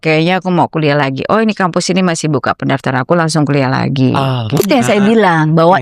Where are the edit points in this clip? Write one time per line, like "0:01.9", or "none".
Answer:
0:04.6